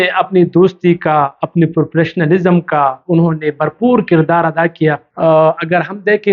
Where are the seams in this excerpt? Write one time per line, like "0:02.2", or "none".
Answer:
0:05.1